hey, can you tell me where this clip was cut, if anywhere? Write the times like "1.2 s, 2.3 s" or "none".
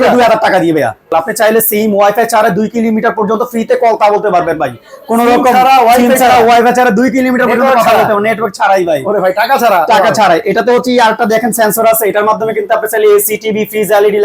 1.1 s